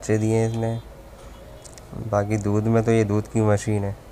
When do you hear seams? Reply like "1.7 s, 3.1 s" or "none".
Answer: none